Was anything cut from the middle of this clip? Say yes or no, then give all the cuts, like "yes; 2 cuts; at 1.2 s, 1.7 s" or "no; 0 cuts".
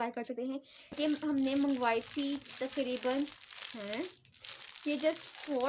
yes; 1 cut; at 1.0 s